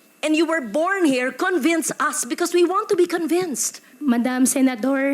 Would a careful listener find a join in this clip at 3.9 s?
yes; 1 cut; at 3.9 s

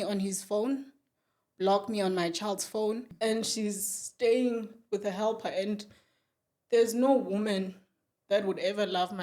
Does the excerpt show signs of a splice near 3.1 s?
yes; 1 cut; at 3.1 s

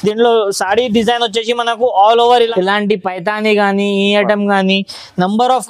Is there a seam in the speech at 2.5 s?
yes; 1 cut; at 2.5 s

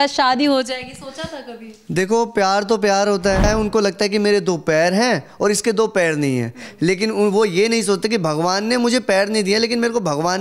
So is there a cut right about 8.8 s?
no; 1 cut; at 3.5 s

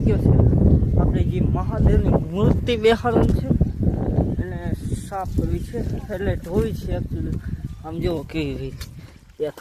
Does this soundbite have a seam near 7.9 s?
no; 0 cuts

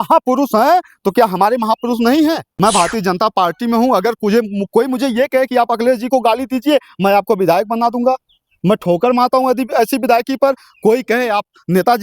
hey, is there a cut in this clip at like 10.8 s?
no; 1 cut; at 2.5 s

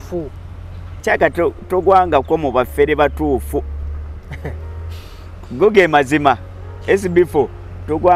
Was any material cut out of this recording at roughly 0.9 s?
yes; 1 cut; at 0.9 s

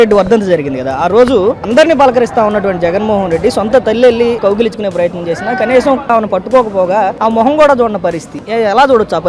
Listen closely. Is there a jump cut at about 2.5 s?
no; 4 cuts; at 4.4 s, 6.1 s, 7.1 s, 8.4 s

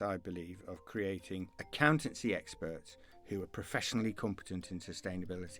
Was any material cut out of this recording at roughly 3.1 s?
no; 0 cuts

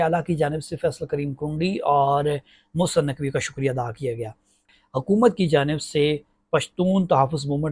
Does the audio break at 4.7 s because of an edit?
yes; 1 cut; at 4.7 s

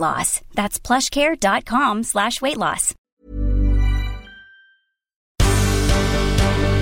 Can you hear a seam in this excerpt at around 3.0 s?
yes; 2 cuts; at 3.0 s, 5.3 s

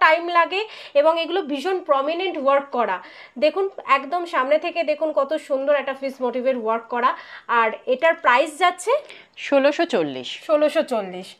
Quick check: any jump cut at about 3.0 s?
no; 0 cuts

